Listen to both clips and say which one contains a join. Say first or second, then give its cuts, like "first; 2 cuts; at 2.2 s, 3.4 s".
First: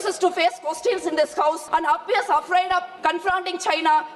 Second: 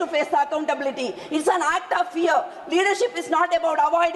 first; 2 cuts; at 1.6 s, 2.9 s